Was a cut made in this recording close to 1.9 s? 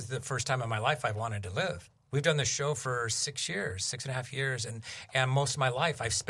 yes; 1 cut; at 1.9 s

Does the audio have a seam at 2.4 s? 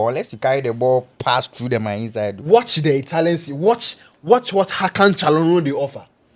yes; 1 cut; at 2.4 s

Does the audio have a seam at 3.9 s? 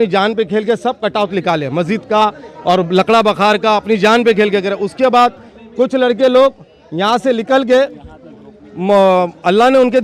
no; 0 cuts

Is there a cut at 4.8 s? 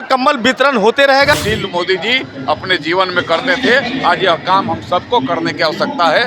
no; 1 cut; at 1.3 s

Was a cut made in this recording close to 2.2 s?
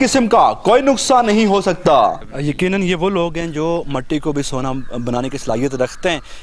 yes; 1 cut; at 2.2 s

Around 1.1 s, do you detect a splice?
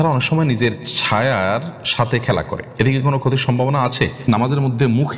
no; 2 cuts; at 2.6 s, 4.3 s

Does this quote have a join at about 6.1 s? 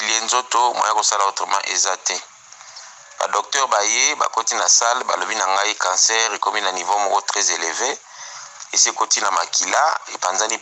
no; 0 cuts

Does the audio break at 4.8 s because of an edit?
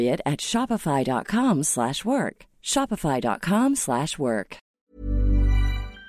yes; 1 cut; at 4.8 s

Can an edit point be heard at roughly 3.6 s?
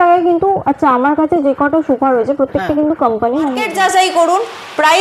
yes; 1 cut; at 3.6 s

